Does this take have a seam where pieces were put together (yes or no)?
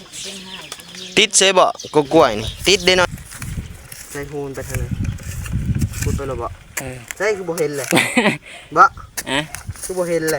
yes